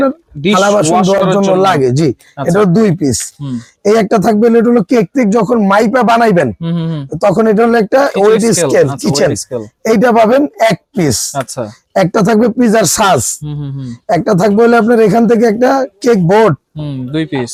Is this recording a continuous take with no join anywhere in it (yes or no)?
yes